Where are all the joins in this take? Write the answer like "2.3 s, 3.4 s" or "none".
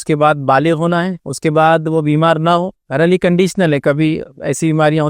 1.2 s, 2.8 s